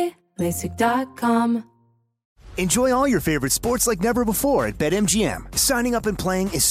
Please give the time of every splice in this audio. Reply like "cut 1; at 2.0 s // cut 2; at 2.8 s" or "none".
cut 1; at 1.5 s